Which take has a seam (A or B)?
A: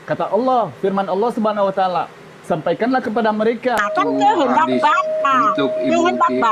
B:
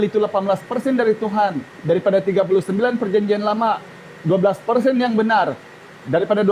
A